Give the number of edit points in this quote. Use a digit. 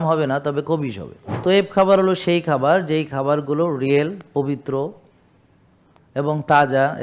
1